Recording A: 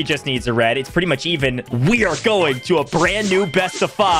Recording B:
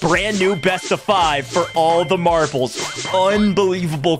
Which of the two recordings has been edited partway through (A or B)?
A